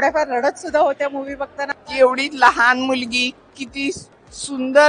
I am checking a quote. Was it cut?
yes; 1 cut; at 1.7 s

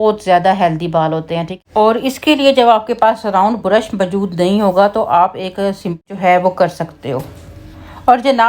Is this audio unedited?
no; 2 cuts; at 1.5 s, 6.0 s

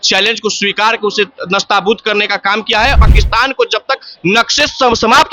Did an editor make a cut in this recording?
yes; 1 cut; at 3.0 s

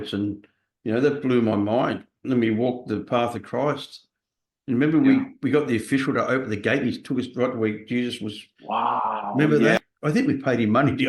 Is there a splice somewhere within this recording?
yes; 1 cut; at 9.8 s

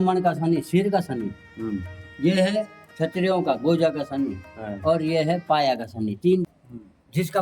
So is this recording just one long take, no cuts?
no; 1 cut; at 6.5 s

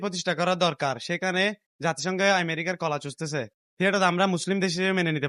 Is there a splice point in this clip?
yes; 1 cut; at 3.6 s

